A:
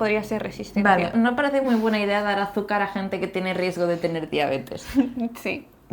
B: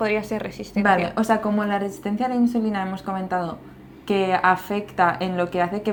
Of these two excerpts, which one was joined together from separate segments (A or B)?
A